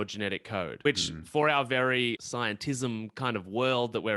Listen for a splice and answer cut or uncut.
cut